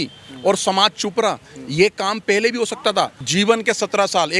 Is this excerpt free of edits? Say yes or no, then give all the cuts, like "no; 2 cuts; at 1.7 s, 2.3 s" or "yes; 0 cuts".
no; 1 cut; at 3.2 s